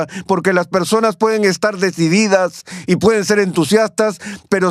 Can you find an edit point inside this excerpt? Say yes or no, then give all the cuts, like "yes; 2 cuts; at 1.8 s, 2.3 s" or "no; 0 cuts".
no; 0 cuts